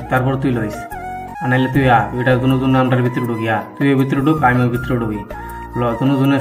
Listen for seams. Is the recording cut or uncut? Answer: cut